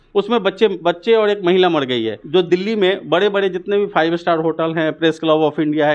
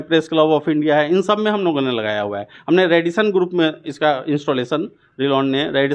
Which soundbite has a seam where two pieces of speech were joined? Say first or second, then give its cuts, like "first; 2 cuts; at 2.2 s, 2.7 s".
first; 1 cut; at 2.2 s